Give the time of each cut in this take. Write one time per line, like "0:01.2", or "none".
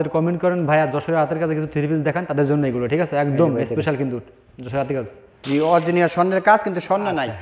0:05.4